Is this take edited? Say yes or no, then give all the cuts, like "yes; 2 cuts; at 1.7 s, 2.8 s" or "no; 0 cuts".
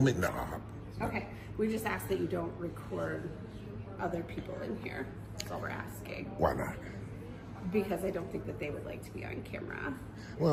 no; 0 cuts